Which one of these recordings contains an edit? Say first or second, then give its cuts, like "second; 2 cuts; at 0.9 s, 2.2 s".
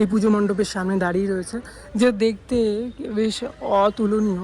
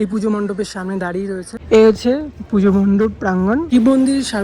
second; 2 cuts; at 1.5 s, 3.7 s